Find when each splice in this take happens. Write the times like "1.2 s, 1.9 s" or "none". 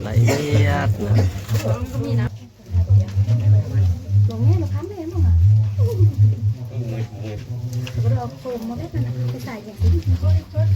2.3 s